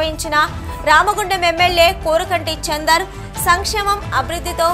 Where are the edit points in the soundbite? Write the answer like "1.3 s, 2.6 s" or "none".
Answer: none